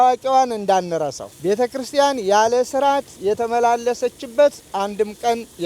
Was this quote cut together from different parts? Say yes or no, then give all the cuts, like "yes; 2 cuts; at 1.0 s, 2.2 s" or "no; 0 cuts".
yes; 1 cut; at 1.3 s